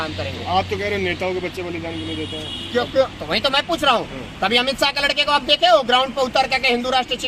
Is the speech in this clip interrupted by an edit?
no; 0 cuts

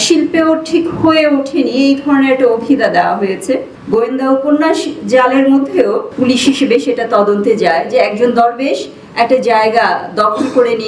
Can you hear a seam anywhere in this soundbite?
yes; 2 cuts; at 3.7 s, 6.1 s

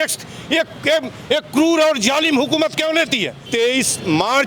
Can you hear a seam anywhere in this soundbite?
yes; 1 cut; at 3.4 s

